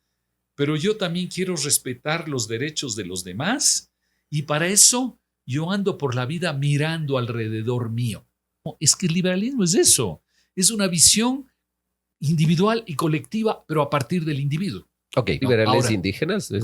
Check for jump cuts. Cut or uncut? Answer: cut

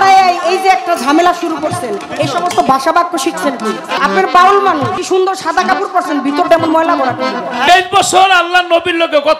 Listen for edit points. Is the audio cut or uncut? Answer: cut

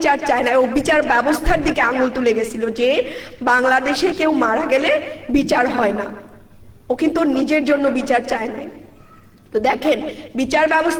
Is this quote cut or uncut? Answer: uncut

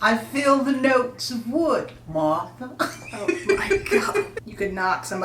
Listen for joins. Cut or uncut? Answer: cut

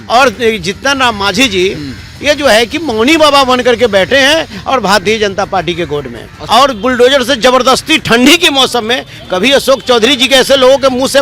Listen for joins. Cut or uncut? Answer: cut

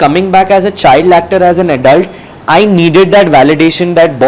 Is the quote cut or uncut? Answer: uncut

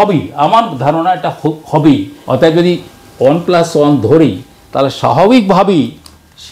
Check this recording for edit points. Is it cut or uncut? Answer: cut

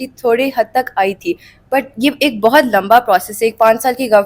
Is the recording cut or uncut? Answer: uncut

